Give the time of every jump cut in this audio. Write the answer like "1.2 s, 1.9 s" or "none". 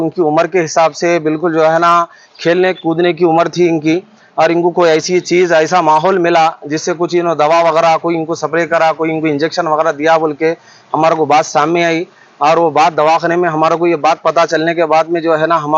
none